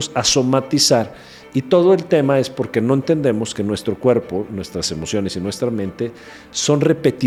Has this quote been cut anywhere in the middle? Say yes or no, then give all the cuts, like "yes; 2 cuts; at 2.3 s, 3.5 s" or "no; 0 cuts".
no; 0 cuts